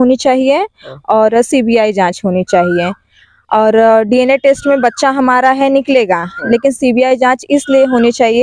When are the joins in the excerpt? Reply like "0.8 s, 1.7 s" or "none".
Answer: none